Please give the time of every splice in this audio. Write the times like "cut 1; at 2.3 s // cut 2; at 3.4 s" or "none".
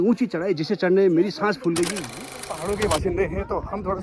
cut 1; at 2.0 s